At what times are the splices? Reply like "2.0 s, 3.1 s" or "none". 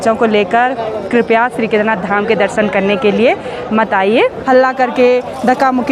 4.4 s